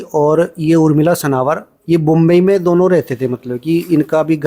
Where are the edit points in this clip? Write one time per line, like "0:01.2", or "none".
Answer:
none